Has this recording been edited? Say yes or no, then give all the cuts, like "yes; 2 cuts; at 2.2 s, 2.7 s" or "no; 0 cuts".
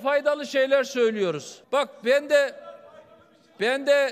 yes; 1 cut; at 1.5 s